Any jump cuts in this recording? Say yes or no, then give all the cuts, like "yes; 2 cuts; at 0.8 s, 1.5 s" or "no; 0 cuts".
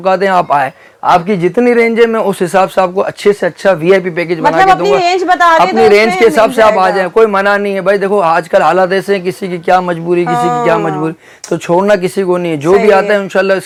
no; 0 cuts